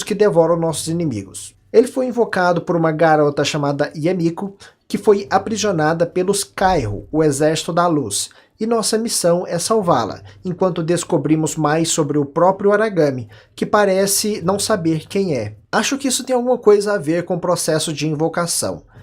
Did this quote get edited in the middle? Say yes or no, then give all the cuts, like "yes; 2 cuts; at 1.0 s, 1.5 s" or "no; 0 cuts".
yes; 1 cut; at 2.9 s